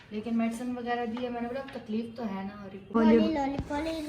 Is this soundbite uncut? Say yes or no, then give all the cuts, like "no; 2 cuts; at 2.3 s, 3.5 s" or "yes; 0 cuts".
no; 1 cut; at 2.9 s